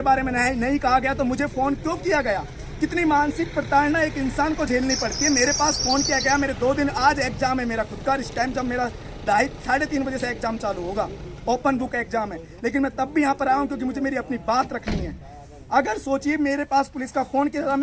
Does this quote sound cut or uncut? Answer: uncut